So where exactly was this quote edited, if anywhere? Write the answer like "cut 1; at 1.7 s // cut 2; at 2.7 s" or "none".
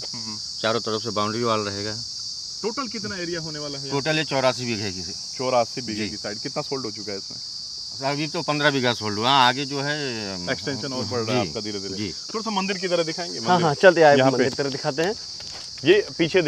none